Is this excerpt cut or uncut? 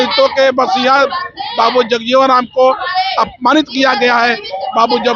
uncut